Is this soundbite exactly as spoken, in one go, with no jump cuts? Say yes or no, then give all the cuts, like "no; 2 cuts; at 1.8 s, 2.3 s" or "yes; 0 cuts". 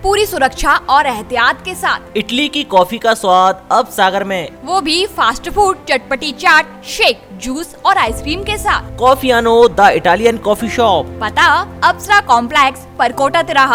yes; 0 cuts